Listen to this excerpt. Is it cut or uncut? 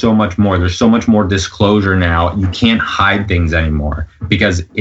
uncut